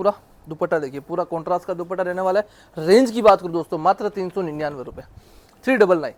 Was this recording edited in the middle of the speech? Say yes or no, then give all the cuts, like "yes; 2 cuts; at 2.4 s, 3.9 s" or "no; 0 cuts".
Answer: no; 0 cuts